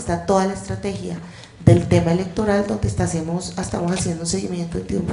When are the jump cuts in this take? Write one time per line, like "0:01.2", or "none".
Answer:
none

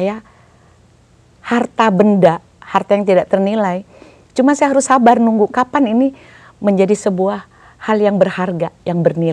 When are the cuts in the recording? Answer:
none

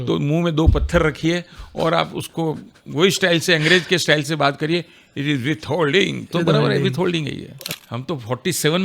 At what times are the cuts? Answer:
0:07.6

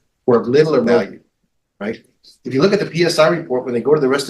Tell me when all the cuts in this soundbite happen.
0:01.0

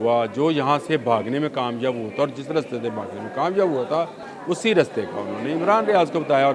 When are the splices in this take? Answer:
0:04.3

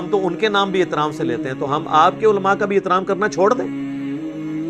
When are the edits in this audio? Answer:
0:03.6

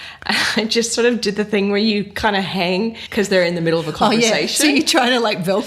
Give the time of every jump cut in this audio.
0:03.0

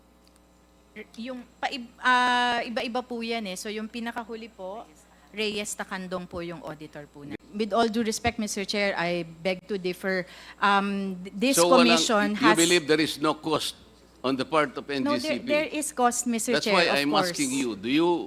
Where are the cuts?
0:07.4

